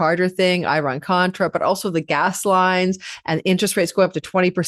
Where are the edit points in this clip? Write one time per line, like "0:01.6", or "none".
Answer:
none